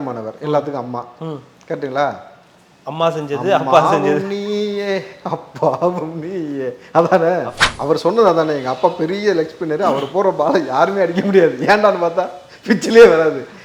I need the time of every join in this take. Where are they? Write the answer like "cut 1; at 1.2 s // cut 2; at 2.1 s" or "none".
cut 1; at 7.5 s

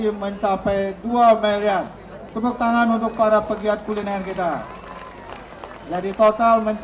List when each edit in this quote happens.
none

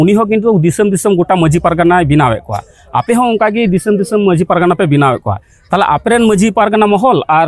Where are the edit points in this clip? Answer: none

